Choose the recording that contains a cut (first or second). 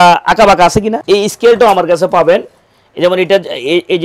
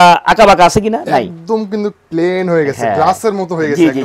first